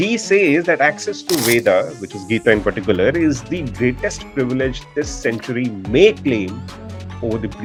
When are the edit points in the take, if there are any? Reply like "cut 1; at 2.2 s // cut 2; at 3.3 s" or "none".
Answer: none

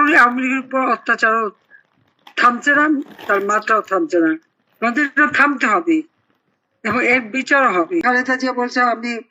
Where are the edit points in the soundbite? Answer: cut 1; at 8.0 s

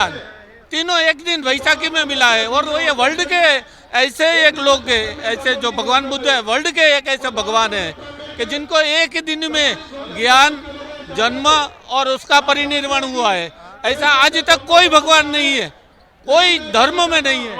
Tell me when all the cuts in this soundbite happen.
none

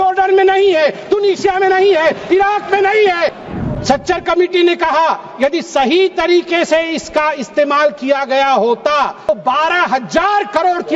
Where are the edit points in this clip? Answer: cut 1; at 3.4 s // cut 2; at 9.3 s

